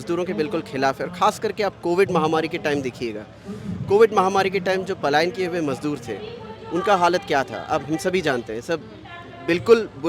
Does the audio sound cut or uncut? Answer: uncut